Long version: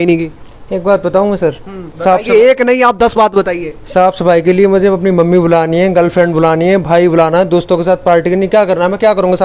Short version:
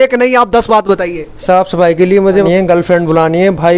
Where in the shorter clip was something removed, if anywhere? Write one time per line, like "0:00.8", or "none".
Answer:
0:02.5